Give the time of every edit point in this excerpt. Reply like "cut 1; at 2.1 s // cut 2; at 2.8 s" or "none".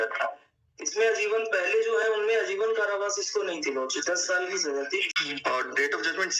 cut 1; at 5.2 s

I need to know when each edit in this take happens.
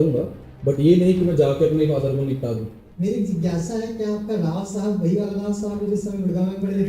cut 1; at 2.8 s

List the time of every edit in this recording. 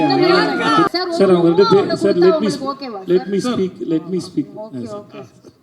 cut 1; at 0.9 s

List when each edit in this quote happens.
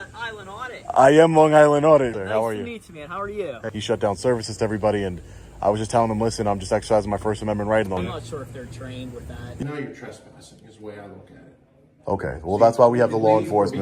cut 1; at 2.2 s // cut 2; at 3.7 s // cut 3; at 8.0 s // cut 4; at 9.6 s

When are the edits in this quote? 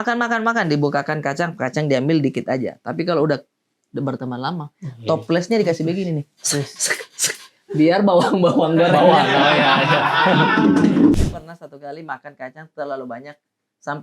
cut 1; at 11.2 s

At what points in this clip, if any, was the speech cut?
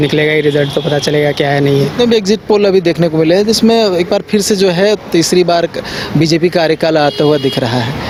none

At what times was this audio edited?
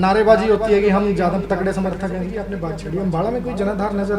cut 1; at 2.4 s

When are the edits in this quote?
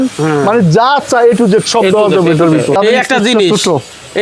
cut 1; at 2.8 s

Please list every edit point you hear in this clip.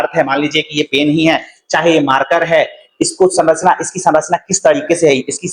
none

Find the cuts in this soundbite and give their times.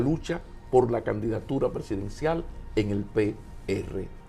none

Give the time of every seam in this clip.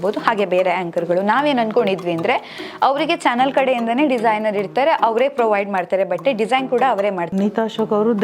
cut 1; at 7.3 s

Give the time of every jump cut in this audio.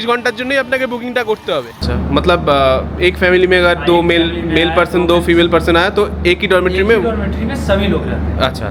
cut 1; at 1.9 s

